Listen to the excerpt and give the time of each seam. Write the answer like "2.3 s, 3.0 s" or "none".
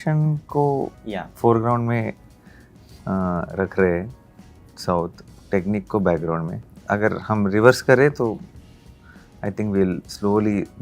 6.7 s